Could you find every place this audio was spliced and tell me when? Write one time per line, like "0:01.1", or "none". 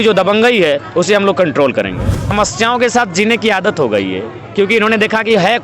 0:02.3